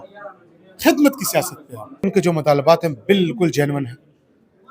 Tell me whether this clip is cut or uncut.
cut